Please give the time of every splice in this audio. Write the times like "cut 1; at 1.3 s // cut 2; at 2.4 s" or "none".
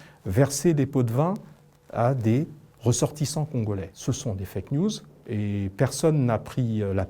cut 1; at 3.9 s